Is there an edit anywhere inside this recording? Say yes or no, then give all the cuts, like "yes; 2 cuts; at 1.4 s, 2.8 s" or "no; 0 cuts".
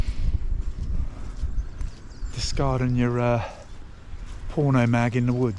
no; 0 cuts